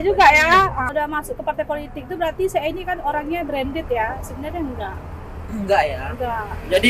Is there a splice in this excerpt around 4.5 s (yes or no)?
no